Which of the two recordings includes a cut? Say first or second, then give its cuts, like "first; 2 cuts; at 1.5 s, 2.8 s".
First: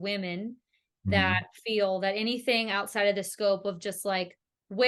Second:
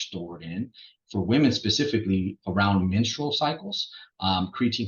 second; 1 cut; at 0.9 s